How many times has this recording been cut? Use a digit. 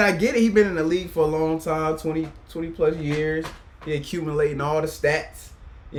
0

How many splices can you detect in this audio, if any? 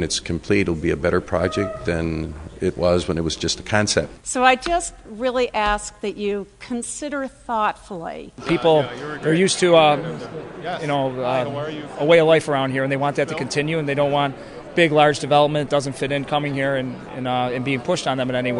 2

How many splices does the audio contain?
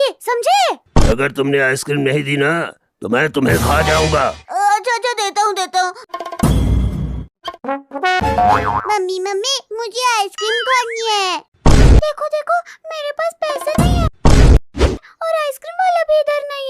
3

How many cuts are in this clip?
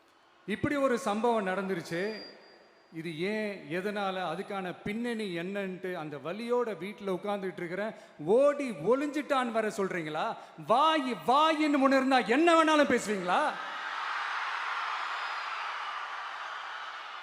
0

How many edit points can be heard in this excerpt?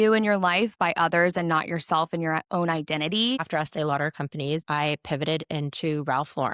2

